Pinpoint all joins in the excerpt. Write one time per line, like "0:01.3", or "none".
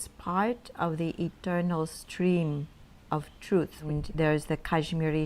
0:03.9